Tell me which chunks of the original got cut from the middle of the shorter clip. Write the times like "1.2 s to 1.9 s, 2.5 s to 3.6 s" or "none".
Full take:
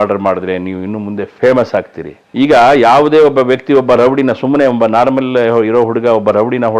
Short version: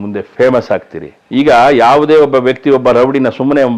none